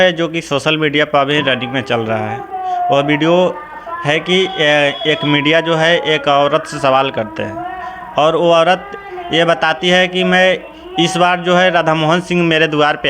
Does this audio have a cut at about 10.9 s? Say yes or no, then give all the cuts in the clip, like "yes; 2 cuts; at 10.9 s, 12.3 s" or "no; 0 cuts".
no; 0 cuts